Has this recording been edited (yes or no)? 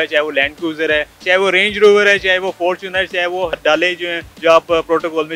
yes